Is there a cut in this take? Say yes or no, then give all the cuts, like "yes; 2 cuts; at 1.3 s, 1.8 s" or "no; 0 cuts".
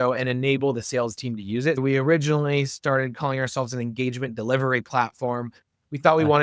yes; 1 cut; at 1.8 s